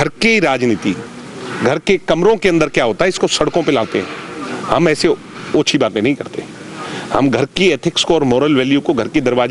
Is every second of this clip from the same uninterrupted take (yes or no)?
yes